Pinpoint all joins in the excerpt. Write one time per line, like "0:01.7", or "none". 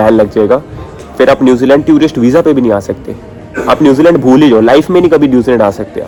none